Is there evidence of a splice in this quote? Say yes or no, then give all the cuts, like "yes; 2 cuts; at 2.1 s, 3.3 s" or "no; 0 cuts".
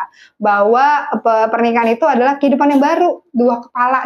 no; 0 cuts